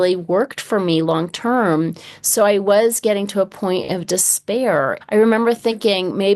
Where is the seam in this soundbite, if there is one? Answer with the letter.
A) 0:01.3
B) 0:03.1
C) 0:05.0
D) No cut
C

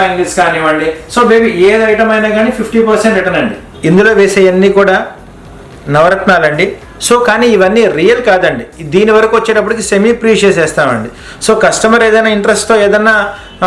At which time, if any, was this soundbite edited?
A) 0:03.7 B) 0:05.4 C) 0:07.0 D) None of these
A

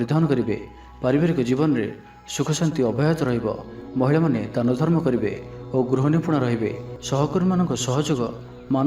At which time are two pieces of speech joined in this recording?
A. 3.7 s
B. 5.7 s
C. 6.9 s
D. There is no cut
C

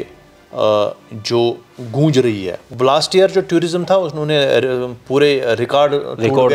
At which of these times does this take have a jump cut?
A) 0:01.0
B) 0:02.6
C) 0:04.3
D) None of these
B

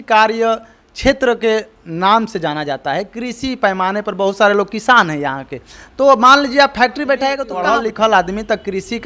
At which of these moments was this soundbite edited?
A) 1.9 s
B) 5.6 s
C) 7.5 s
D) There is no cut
C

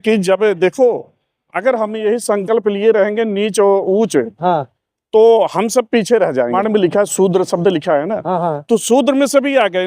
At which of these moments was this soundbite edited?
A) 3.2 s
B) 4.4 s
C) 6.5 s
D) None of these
C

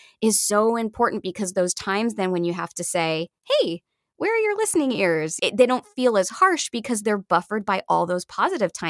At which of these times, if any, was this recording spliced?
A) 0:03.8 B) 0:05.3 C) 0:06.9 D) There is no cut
B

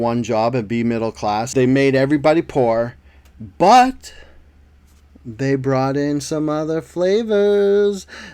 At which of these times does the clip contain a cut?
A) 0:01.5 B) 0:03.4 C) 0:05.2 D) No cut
A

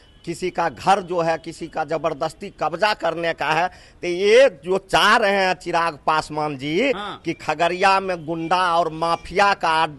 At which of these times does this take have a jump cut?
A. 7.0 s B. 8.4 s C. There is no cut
C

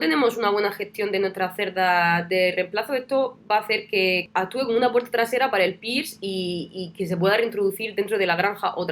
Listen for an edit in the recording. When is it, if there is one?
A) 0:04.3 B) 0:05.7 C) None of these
A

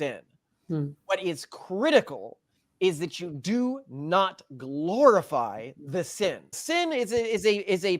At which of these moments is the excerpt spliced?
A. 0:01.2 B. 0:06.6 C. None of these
B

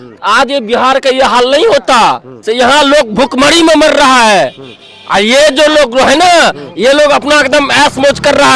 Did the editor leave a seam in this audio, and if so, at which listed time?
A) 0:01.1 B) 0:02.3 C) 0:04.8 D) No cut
B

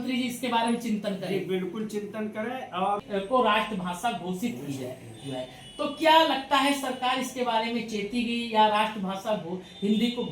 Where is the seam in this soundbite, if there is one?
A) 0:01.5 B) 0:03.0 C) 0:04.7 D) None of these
B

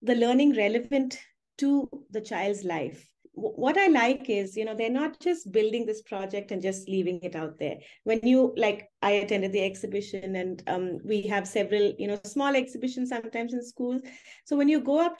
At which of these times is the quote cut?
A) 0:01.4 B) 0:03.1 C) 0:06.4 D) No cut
B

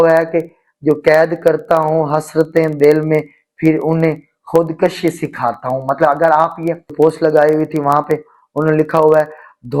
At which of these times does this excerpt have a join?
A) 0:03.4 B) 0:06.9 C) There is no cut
B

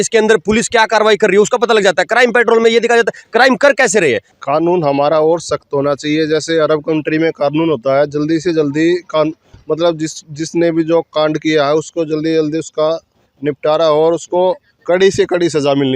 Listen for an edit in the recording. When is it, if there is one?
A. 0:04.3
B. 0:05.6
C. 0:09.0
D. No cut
A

